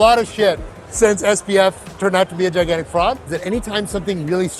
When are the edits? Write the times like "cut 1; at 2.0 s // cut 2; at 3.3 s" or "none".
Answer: cut 1; at 3.3 s